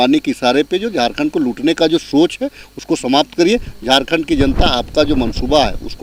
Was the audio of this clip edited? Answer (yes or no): no